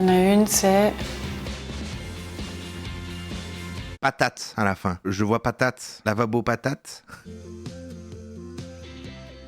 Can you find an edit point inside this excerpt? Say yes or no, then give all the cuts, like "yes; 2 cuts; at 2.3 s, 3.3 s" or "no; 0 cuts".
yes; 2 cuts; at 3.9 s, 7.2 s